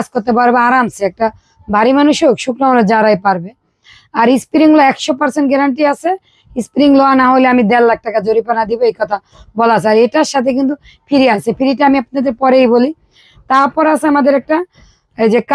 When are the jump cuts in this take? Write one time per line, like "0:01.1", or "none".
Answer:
none